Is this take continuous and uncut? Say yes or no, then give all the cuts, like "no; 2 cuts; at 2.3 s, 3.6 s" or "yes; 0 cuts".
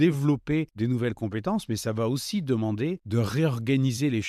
yes; 0 cuts